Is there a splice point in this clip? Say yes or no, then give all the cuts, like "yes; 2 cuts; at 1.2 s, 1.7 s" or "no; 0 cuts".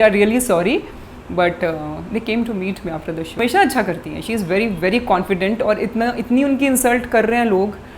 yes; 1 cut; at 3.4 s